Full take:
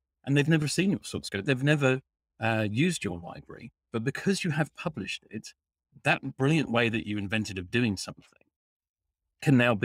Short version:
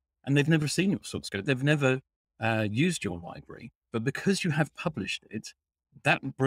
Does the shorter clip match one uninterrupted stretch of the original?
yes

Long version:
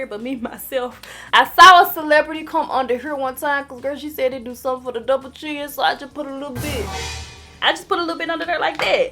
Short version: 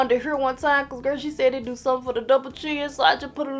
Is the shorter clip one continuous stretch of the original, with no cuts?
yes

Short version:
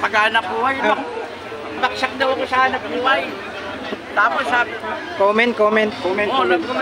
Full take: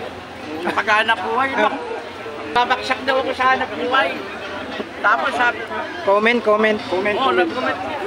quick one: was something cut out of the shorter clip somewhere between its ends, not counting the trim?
yes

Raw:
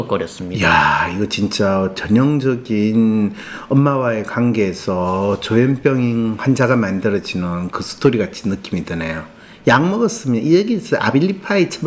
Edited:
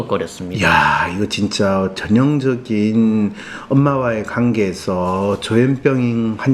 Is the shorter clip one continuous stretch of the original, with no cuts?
yes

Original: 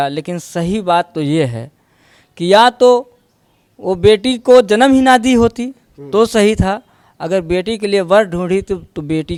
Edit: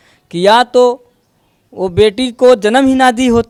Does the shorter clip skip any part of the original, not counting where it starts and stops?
no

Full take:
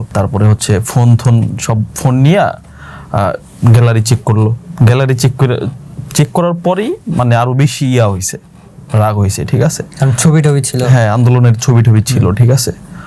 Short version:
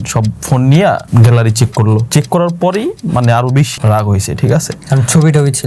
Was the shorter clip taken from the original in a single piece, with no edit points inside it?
no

